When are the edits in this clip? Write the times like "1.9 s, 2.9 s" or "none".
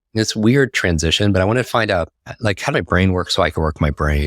2.7 s